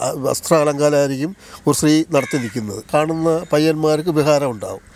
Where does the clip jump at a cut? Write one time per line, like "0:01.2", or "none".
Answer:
0:02.8